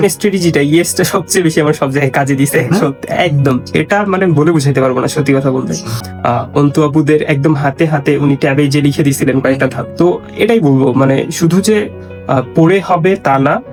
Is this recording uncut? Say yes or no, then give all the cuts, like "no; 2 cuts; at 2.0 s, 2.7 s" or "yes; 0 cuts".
yes; 0 cuts